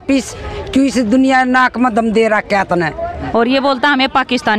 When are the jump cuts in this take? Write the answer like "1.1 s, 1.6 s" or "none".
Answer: 3.1 s